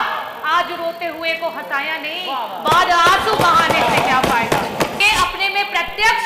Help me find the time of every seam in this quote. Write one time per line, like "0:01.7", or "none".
0:05.0